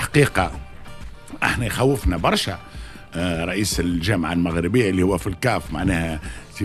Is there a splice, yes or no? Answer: no